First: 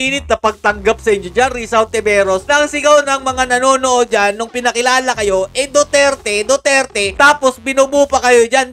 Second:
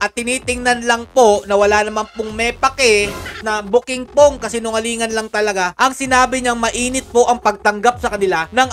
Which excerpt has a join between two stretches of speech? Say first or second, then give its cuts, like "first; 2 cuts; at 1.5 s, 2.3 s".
second; 1 cut; at 3.5 s